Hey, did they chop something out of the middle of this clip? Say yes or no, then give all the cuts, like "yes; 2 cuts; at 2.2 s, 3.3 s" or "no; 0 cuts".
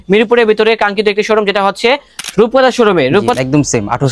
yes; 2 cuts; at 2.1 s, 3.3 s